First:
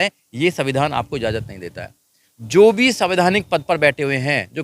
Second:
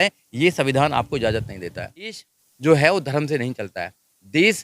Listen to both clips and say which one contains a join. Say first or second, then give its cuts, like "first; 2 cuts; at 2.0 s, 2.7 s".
second; 1 cut; at 2.3 s